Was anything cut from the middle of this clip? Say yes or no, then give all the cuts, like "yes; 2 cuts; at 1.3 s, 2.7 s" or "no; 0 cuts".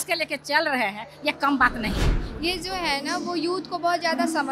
yes; 1 cut; at 2.2 s